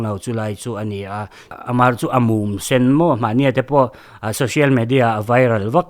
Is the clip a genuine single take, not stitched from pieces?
no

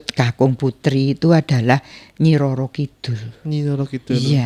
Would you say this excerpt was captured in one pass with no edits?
yes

